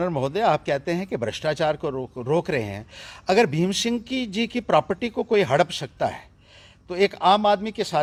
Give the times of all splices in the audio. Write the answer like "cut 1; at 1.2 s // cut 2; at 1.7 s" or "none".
none